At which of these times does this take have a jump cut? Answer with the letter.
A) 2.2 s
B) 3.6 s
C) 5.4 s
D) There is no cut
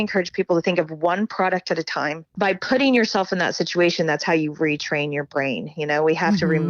A